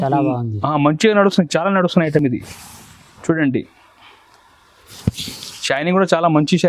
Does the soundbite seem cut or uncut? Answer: uncut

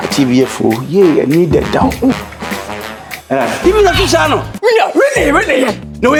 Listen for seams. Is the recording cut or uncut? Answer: uncut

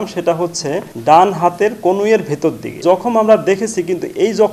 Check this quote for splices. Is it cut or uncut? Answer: cut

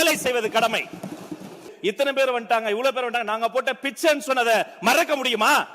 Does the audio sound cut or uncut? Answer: cut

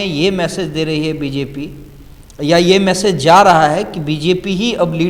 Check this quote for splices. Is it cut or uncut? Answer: uncut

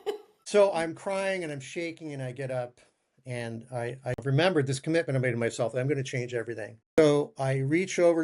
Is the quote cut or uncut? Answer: cut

